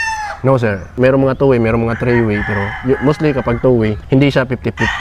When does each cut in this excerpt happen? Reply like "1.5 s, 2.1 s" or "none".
0.9 s, 4.0 s